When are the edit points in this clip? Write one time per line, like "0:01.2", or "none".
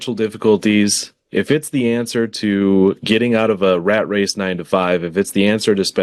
none